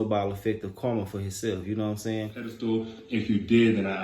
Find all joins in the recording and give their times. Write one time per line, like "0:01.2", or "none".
0:02.4